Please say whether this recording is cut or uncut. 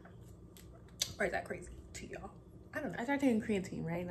cut